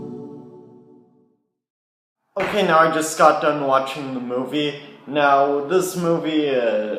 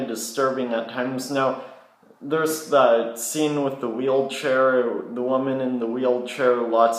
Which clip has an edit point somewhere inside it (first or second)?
second